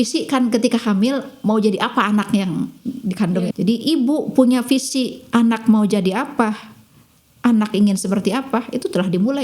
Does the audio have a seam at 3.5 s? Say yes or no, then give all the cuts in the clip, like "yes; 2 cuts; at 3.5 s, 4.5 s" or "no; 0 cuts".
yes; 1 cut; at 3.5 s